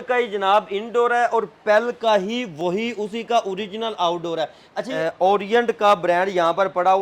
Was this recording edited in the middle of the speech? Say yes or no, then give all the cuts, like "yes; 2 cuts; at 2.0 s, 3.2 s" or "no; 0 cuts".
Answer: yes; 1 cut; at 4.9 s